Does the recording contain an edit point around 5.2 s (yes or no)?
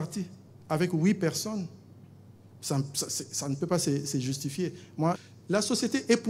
yes